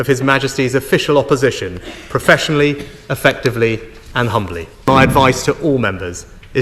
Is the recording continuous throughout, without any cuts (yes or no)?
no